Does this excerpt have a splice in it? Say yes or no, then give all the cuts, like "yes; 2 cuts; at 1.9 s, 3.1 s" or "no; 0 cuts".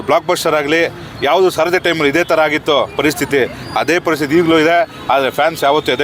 no; 0 cuts